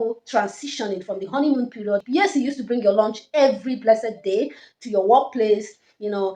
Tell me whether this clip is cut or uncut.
cut